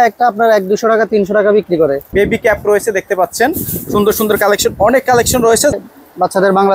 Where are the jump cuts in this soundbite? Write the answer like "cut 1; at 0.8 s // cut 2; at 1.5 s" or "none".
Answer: cut 1; at 2.1 s // cut 2; at 5.7 s